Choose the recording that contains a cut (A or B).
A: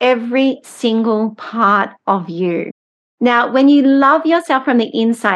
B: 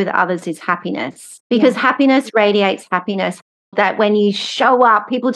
B